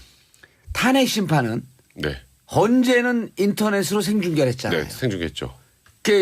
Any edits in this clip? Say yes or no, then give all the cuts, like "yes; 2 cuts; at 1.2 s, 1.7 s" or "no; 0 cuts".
no; 0 cuts